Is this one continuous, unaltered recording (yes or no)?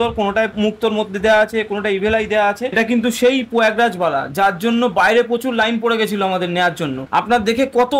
no